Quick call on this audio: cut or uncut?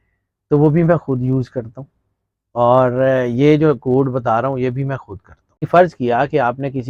cut